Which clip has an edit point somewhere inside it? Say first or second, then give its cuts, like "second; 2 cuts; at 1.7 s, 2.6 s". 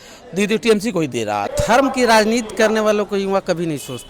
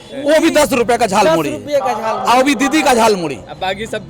first; 1 cut; at 1.5 s